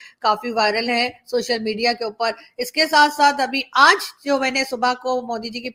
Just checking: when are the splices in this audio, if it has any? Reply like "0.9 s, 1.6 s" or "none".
none